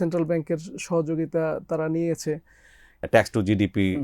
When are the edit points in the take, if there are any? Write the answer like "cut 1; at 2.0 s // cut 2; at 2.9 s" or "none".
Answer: cut 1; at 3.0 s